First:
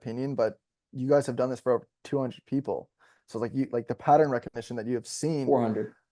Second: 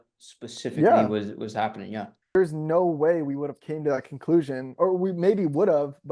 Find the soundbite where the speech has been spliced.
second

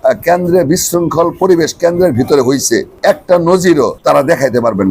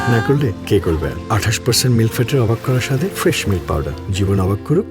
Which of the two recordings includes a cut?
first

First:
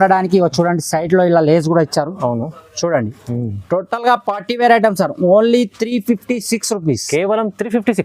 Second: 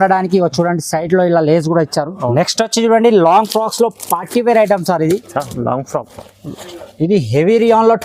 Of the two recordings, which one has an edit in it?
second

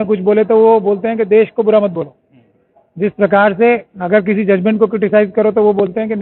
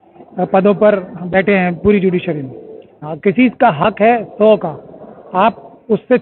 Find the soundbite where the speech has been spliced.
second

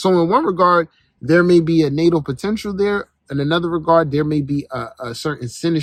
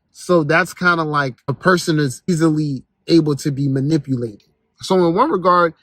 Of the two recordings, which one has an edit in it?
second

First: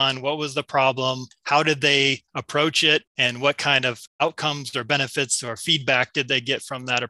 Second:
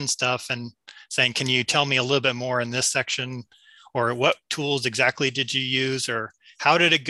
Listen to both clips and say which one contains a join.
first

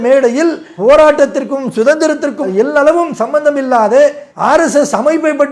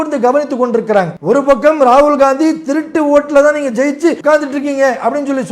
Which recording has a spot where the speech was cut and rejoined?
second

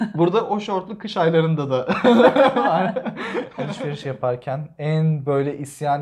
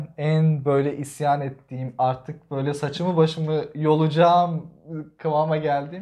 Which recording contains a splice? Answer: first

